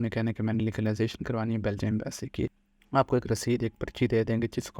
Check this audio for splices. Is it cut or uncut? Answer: cut